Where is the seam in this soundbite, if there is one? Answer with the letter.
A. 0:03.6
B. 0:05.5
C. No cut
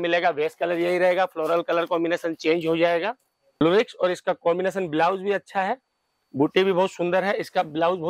A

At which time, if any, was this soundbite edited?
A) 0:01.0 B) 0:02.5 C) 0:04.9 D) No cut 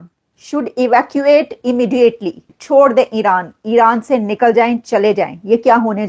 B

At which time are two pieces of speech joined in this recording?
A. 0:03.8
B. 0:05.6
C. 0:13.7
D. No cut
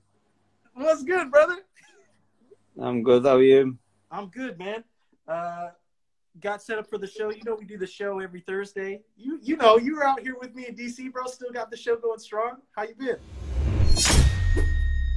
C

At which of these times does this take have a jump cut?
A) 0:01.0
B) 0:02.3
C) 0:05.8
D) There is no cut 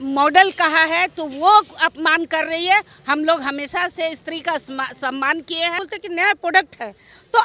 C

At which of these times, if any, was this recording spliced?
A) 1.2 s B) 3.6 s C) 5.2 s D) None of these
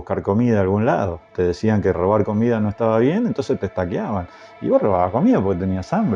A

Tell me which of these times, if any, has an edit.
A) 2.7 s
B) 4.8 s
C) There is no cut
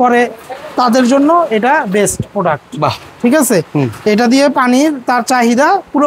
C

